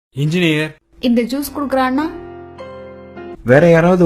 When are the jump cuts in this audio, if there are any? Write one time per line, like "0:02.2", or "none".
none